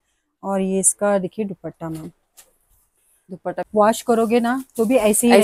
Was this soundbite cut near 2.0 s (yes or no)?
no